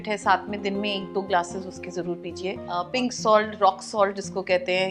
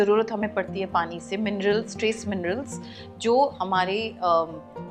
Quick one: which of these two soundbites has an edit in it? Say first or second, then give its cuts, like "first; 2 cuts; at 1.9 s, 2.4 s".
first; 1 cut; at 2.7 s